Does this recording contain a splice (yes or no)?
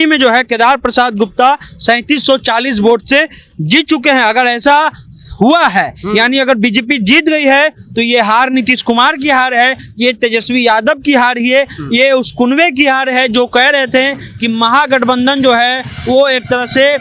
no